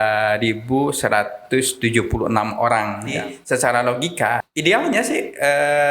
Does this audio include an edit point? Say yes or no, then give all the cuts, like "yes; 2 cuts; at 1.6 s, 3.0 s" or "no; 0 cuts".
yes; 2 cuts; at 3.1 s, 4.5 s